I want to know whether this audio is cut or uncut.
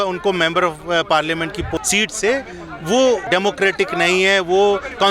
cut